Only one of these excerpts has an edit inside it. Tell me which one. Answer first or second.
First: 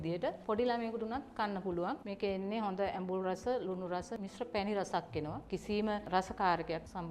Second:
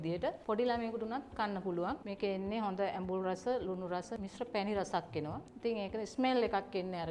first